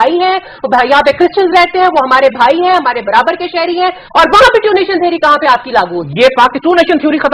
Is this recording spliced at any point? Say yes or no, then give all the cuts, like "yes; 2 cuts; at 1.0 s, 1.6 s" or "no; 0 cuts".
no; 0 cuts